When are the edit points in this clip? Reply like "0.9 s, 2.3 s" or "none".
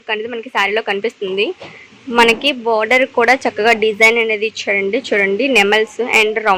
none